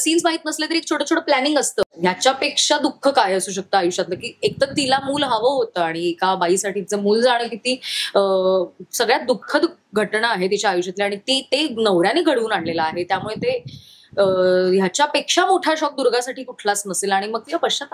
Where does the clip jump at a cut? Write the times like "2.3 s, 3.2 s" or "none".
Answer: 1.9 s

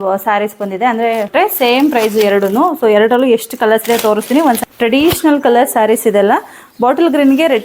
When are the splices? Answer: 1.3 s, 4.6 s

